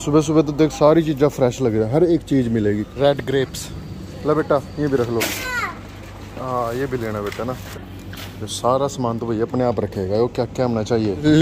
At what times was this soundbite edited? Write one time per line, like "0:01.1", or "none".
none